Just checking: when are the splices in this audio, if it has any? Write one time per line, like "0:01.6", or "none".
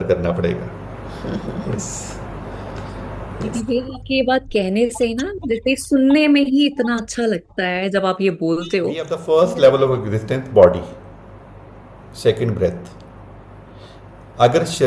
0:09.1